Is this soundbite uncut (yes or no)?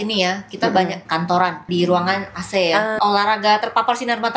no